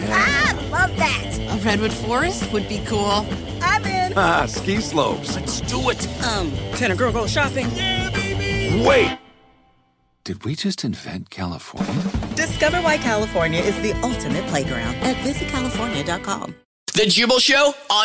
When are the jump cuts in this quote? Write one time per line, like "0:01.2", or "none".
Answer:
0:16.8